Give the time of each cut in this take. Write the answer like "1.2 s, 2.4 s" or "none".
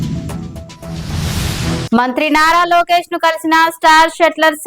1.8 s